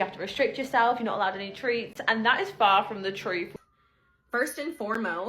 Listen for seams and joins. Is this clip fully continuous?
no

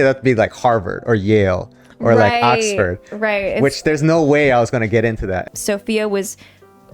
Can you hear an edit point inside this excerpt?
yes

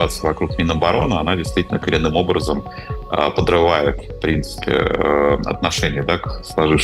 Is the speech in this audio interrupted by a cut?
no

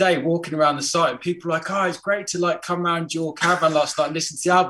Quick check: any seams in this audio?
no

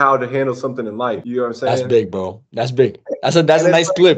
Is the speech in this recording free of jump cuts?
yes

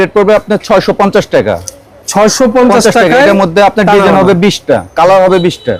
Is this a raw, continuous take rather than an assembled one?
yes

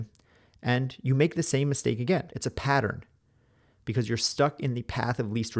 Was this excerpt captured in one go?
no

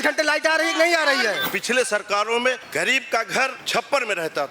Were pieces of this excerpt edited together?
yes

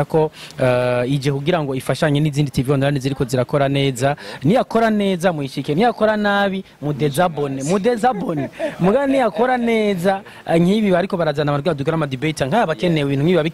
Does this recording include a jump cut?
no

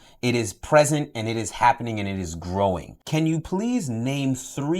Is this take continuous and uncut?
no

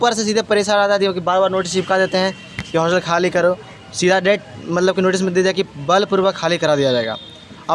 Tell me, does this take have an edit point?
no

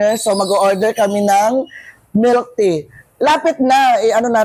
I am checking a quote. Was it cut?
no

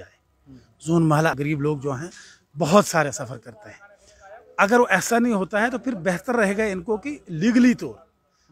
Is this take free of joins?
no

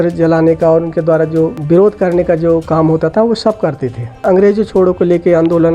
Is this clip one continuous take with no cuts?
no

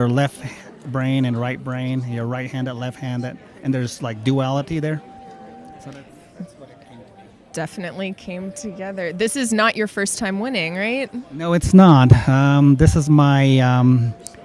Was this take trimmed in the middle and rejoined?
yes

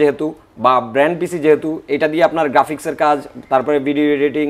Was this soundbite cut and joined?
no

